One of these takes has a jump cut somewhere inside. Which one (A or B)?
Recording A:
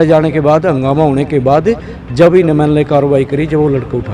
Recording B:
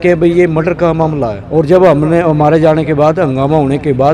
B